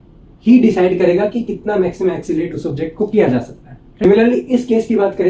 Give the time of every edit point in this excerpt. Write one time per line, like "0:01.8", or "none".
0:04.0